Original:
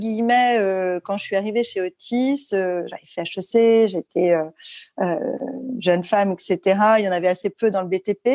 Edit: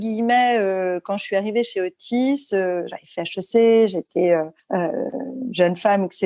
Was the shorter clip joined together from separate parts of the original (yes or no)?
yes